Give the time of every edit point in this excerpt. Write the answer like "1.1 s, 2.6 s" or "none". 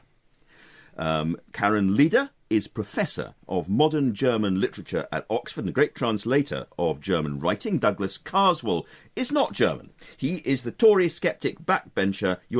10.0 s